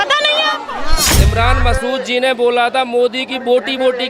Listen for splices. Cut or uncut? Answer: cut